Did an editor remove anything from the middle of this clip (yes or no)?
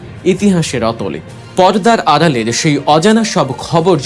no